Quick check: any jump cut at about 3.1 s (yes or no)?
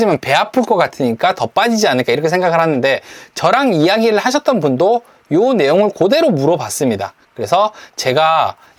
no